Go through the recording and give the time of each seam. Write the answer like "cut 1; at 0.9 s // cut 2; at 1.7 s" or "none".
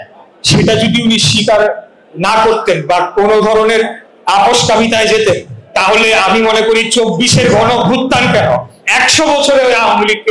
none

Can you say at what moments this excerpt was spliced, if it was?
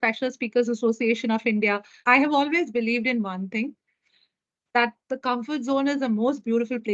cut 1; at 1.9 s

